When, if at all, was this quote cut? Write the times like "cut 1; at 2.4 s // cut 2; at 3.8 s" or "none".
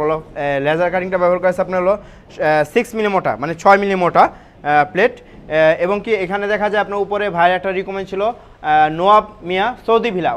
none